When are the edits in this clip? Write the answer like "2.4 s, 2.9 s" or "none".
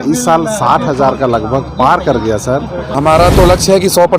2.9 s